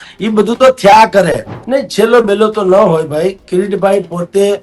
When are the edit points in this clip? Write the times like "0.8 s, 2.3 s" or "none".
1.5 s